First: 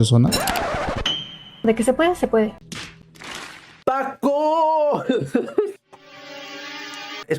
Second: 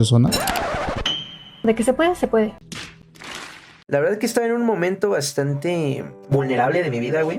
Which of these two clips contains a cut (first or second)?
second